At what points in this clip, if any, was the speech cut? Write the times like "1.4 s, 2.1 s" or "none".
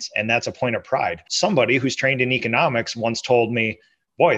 1.3 s